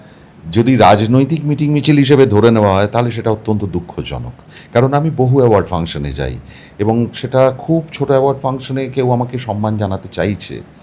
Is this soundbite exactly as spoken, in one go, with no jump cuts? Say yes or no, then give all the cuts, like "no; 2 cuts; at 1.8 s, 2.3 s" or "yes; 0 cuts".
yes; 0 cuts